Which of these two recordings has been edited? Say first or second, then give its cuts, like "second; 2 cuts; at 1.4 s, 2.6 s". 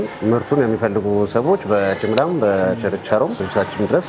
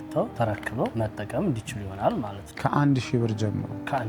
second; 2 cuts; at 0.9 s, 2.4 s